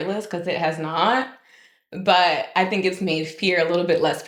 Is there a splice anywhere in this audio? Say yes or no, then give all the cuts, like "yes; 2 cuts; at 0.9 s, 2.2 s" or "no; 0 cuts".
no; 0 cuts